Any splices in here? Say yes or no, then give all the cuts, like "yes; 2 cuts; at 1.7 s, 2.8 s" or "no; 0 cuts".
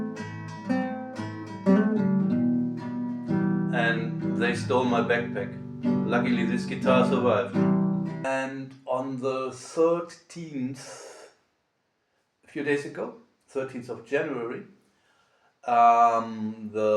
yes; 1 cut; at 8.2 s